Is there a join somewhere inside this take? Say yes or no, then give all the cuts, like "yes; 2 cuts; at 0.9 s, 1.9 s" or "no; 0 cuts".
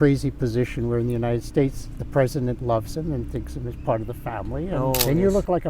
yes; 1 cut; at 4.7 s